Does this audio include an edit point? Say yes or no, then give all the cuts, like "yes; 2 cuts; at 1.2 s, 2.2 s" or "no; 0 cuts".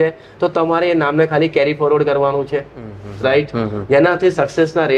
no; 0 cuts